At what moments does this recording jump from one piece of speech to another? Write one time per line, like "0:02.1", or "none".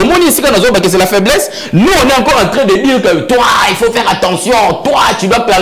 none